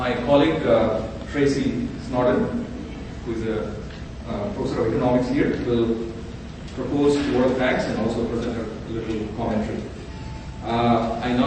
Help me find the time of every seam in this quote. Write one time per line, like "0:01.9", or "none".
0:09.7